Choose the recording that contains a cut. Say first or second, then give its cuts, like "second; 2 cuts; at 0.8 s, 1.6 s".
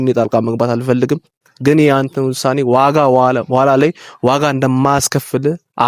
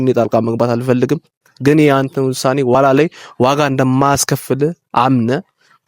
second; 1 cut; at 2.7 s